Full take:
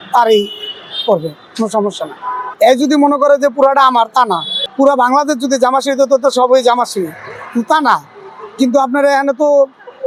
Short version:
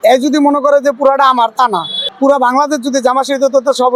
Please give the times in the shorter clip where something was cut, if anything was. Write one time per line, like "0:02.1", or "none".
none